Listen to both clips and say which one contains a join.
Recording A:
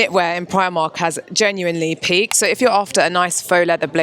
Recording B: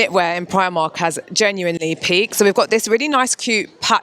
A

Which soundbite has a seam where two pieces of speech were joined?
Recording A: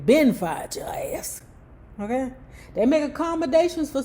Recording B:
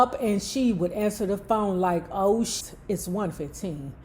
B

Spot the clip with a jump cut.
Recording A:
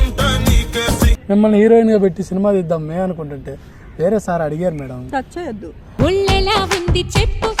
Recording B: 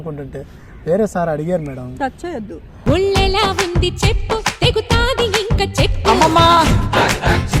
A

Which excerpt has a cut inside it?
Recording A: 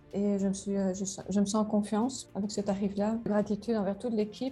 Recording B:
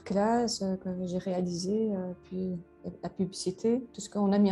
A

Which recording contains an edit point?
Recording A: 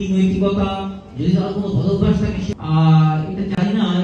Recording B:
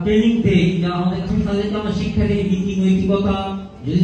A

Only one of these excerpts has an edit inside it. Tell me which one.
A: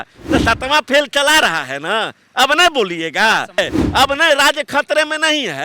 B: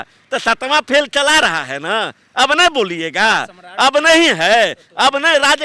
A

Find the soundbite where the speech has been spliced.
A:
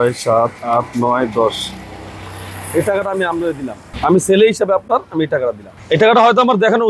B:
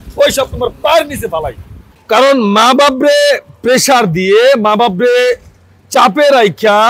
B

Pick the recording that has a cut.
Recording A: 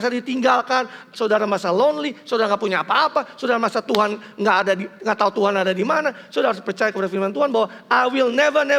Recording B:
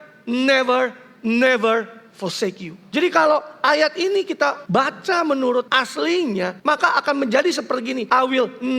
B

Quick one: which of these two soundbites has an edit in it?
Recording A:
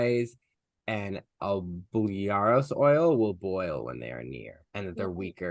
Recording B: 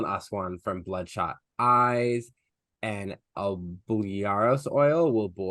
A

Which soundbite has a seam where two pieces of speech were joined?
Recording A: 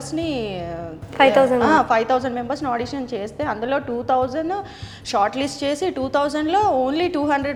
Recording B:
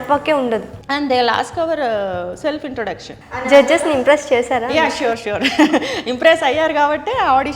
B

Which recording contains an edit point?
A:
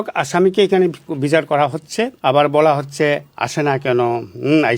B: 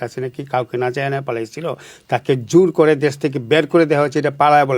A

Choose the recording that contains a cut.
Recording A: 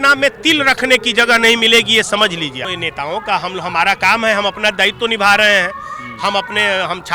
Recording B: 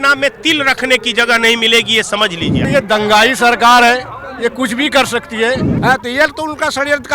B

